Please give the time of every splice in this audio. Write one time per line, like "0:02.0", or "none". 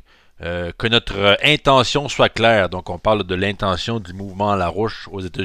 0:03.5